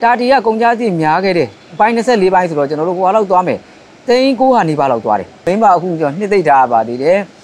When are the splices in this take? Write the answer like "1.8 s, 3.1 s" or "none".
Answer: 5.4 s